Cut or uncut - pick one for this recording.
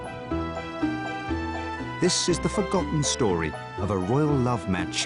cut